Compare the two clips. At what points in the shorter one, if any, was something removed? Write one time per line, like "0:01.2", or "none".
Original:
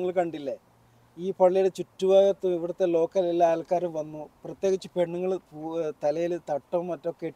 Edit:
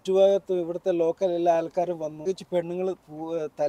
0:02.3